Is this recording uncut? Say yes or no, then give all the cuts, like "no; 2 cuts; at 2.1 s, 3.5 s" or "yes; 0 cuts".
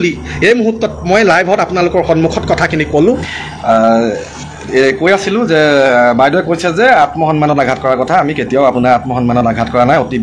no; 1 cut; at 3.3 s